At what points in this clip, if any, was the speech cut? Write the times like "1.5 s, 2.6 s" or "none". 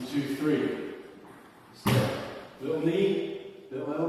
none